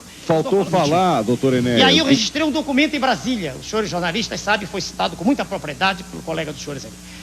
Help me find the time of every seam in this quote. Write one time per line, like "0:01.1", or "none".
0:01.8